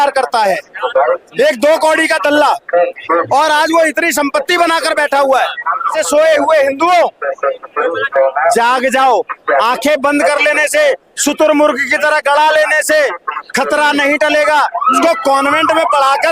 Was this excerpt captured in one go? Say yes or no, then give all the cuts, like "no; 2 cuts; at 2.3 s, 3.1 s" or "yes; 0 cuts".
no; 2 cuts; at 6.0 s, 15.0 s